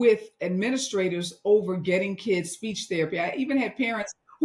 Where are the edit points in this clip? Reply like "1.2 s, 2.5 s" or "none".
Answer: none